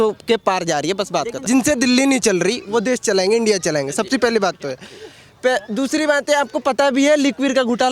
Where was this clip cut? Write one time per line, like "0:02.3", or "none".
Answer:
0:01.4